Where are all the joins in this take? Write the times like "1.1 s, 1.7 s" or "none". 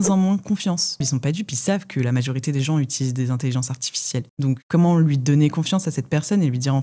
1.0 s